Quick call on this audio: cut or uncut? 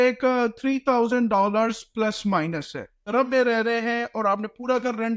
cut